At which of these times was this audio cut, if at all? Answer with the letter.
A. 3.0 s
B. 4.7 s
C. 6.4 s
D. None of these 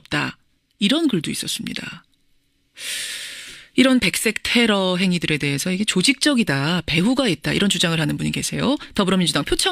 C